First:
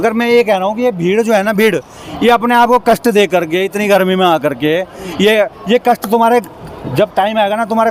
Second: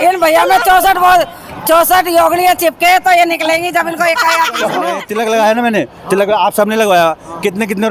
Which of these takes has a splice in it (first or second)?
second